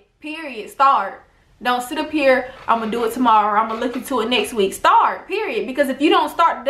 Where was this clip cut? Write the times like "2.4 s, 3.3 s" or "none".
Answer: none